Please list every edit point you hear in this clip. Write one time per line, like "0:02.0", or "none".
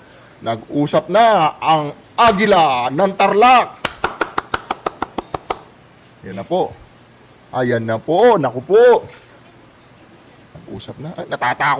none